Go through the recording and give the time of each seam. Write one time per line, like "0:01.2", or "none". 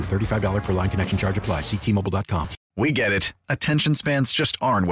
0:02.6